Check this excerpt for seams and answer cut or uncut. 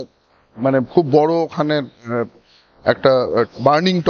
uncut